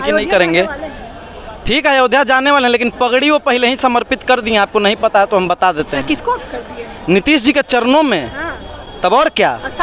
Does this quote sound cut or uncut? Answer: uncut